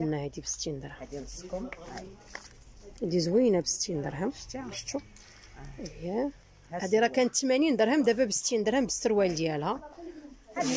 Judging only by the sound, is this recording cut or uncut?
uncut